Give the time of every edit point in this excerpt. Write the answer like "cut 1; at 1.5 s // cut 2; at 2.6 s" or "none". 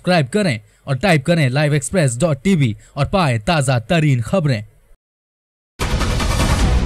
cut 1; at 5.7 s